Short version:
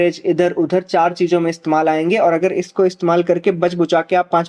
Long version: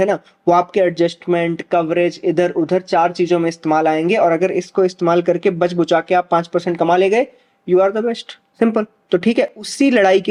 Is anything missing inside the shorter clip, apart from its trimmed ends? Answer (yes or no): no